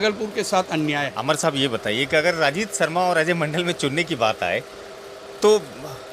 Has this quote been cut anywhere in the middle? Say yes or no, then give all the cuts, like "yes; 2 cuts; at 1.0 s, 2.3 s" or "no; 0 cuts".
yes; 1 cut; at 1.1 s